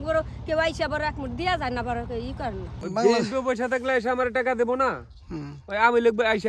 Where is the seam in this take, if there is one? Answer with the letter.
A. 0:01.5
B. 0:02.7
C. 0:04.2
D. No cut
B